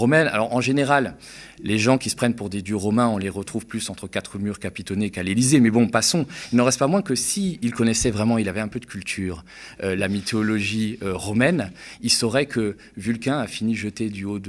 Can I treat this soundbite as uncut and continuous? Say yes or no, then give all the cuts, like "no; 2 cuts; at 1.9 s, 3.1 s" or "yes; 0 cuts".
yes; 0 cuts